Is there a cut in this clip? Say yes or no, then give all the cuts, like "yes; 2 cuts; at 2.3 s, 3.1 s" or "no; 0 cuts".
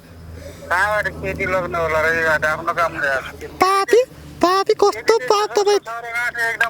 yes; 1 cut; at 3.4 s